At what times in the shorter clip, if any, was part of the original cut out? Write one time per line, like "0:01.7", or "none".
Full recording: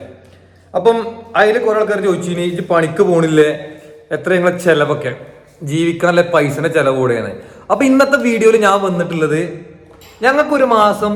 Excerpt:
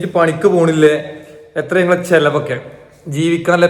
none